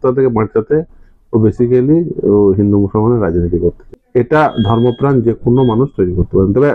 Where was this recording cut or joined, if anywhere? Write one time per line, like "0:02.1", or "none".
0:03.8